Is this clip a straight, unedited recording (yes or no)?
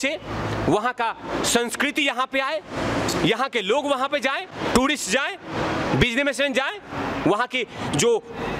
yes